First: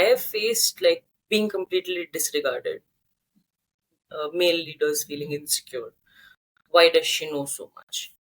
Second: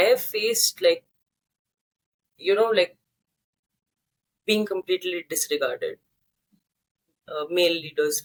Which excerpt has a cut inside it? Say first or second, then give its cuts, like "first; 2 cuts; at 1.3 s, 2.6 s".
first; 1 cut; at 1.1 s